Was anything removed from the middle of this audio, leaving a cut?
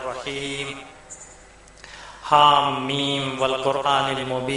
yes; 1 cut; at 2.4 s

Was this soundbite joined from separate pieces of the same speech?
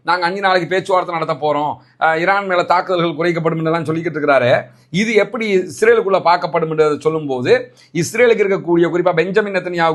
no; 0 cuts

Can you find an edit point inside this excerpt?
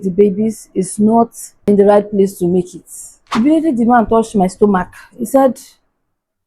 yes; 2 cuts; at 1.5 s, 3.3 s

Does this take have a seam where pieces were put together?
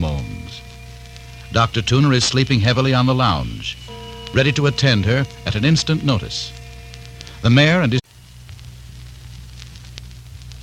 no; 0 cuts

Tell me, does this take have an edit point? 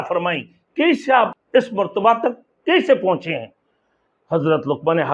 yes; 1 cut; at 1.3 s

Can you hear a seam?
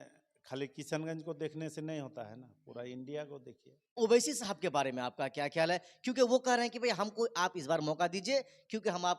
yes; 1 cut; at 4.0 s

